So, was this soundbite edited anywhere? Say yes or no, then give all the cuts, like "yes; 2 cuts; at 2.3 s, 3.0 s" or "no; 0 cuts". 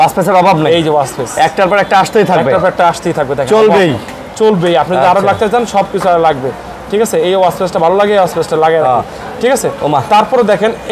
no; 0 cuts